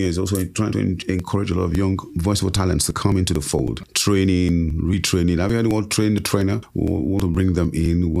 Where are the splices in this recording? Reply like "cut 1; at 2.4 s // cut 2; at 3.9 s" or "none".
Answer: cut 1; at 2.1 s // cut 2; at 3.9 s // cut 3; at 6.7 s